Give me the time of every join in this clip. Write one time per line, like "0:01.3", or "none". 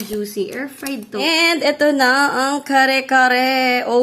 0:01.0